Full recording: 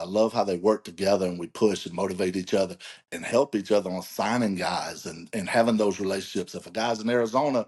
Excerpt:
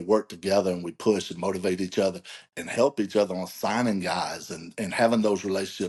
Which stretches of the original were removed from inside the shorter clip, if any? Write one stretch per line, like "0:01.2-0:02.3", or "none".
none